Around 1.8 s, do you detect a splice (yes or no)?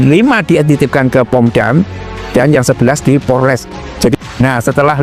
no